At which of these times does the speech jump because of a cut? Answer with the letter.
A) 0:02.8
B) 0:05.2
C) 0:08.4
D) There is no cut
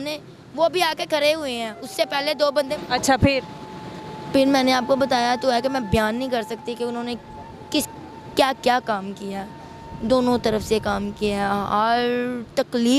A